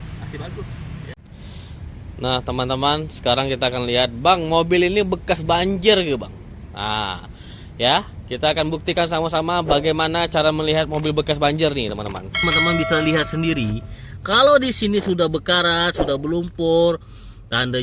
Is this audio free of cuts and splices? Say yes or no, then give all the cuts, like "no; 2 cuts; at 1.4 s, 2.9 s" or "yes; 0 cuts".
no; 2 cuts; at 1.2 s, 12.4 s